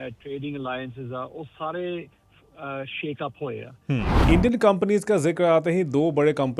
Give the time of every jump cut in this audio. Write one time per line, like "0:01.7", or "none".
0:04.2